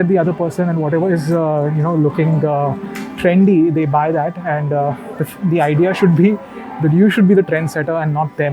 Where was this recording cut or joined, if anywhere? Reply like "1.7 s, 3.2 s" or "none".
none